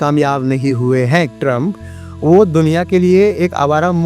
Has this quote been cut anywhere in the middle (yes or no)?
yes